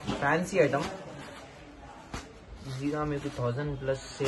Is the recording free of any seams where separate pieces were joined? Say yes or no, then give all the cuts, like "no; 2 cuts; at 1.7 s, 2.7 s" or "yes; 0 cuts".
yes; 0 cuts